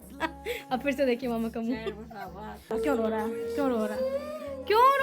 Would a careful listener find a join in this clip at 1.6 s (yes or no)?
no